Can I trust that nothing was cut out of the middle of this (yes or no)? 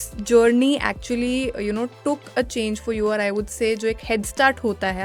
yes